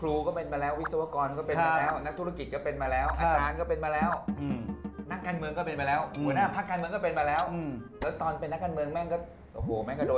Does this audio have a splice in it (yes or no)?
no